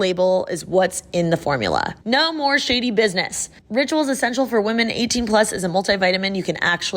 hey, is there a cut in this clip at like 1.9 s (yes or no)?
yes